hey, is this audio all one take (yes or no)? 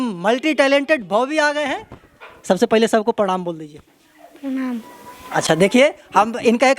yes